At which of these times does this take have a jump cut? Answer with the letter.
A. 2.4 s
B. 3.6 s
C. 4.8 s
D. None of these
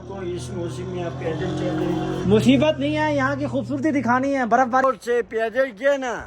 C